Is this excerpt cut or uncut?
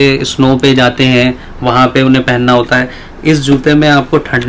uncut